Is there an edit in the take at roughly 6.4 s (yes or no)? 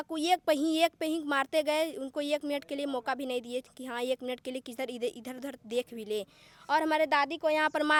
no